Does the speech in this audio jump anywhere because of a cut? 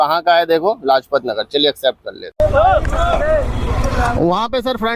yes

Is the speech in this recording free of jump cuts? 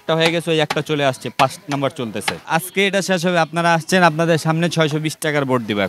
no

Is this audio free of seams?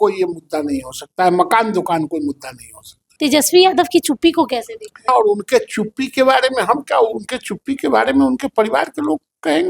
no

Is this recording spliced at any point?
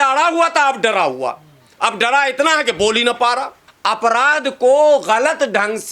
yes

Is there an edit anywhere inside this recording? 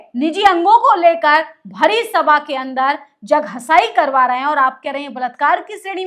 no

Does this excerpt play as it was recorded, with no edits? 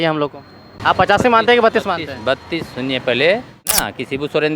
no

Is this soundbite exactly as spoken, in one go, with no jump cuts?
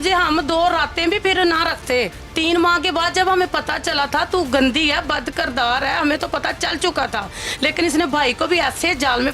no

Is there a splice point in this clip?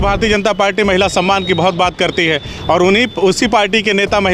no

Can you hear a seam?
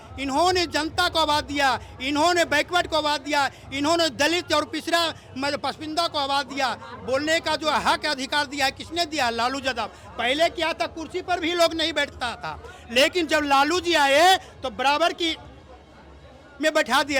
no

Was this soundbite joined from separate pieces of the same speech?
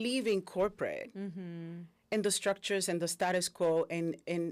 no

